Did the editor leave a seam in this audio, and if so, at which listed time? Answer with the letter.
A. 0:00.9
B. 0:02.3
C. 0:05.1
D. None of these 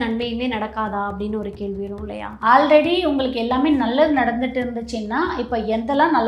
B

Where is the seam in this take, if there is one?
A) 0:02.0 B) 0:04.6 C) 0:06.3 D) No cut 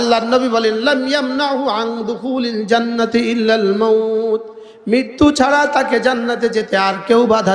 D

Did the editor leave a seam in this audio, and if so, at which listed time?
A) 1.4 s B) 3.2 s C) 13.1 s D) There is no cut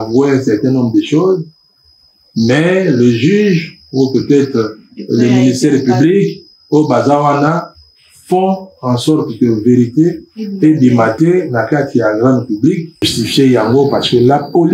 C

